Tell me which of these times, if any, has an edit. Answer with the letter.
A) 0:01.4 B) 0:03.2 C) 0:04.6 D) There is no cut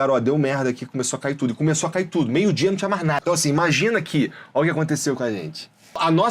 B